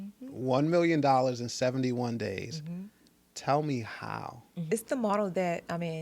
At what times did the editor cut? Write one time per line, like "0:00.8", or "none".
0:04.7

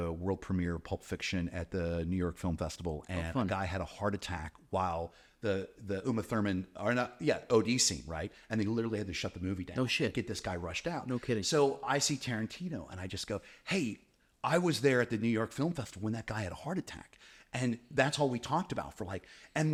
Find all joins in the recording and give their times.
none

